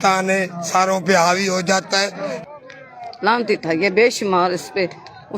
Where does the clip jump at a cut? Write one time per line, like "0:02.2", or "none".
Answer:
0:02.4